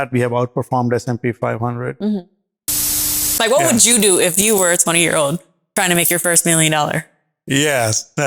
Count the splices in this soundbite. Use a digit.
1